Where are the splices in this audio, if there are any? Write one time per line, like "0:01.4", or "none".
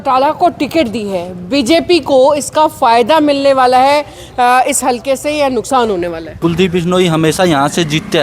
0:06.3